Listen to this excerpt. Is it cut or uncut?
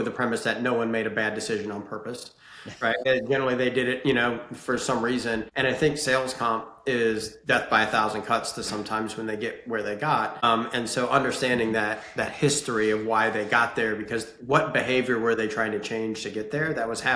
cut